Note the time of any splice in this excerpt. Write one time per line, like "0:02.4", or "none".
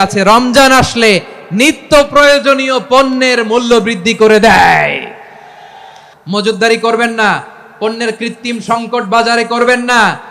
0:06.1